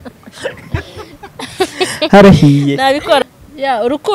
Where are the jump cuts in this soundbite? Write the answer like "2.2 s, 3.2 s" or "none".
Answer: 3.2 s